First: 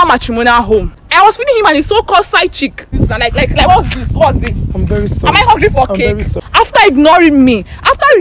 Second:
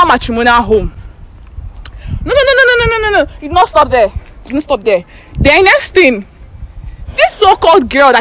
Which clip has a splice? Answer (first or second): first